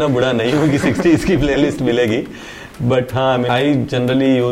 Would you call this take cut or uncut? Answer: cut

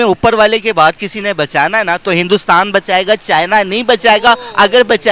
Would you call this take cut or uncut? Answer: uncut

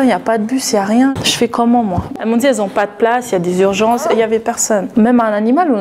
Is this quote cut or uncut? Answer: cut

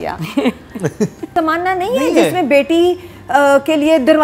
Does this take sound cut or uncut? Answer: cut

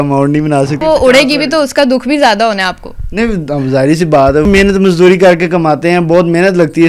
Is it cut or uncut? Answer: cut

